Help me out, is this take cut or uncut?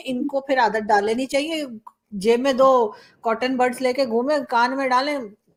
uncut